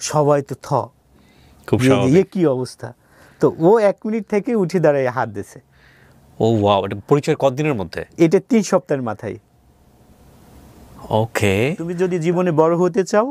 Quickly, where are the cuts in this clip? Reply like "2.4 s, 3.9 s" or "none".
12.0 s